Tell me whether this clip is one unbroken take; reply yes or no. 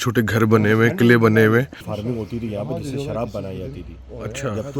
no